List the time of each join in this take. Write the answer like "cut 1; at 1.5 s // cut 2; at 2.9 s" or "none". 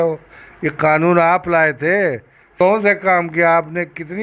cut 1; at 2.5 s